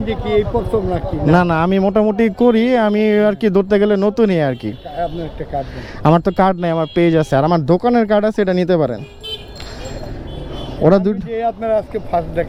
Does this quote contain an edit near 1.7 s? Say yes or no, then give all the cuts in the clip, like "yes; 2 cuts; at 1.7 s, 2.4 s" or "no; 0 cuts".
no; 0 cuts